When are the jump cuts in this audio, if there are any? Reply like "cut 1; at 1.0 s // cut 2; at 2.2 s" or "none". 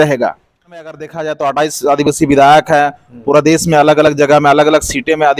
cut 1; at 1.1 s